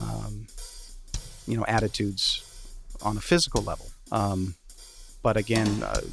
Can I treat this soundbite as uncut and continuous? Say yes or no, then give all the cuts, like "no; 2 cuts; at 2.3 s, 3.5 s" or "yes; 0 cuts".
no; 1 cut; at 3.8 s